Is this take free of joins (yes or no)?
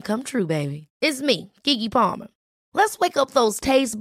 yes